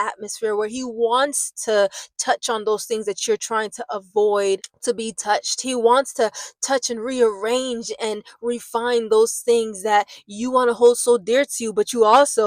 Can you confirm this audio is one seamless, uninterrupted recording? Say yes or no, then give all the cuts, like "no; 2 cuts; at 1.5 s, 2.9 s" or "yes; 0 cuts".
yes; 0 cuts